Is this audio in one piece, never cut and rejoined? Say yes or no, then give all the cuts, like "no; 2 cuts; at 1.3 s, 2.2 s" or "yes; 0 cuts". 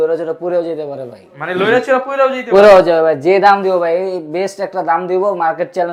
yes; 0 cuts